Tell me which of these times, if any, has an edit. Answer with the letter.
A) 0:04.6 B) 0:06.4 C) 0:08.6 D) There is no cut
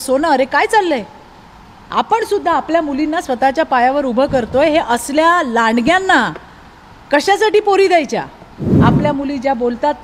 C